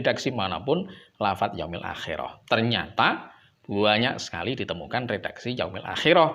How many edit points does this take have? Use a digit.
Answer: 1